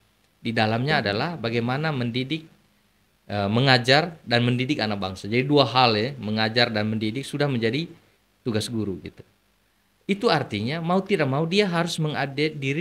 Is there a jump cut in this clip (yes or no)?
no